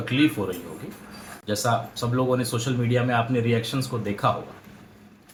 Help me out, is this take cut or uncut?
uncut